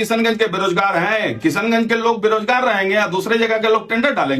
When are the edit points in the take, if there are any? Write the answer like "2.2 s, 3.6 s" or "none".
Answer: none